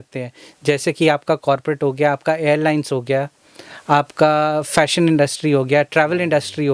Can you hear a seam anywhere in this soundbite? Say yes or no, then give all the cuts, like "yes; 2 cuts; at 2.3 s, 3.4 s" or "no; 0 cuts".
no; 0 cuts